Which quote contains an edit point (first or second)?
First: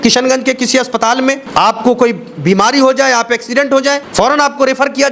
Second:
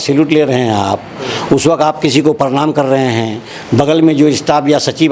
first